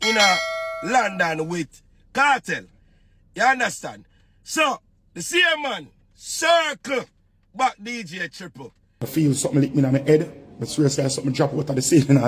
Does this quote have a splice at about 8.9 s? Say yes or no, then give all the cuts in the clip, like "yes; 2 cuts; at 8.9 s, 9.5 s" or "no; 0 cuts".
yes; 1 cut; at 8.9 s